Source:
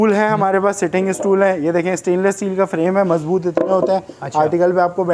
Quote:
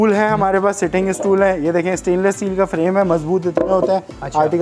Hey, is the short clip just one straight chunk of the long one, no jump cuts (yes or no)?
yes